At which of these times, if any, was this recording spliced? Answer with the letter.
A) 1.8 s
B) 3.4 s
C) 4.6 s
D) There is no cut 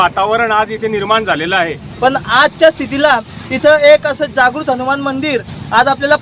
A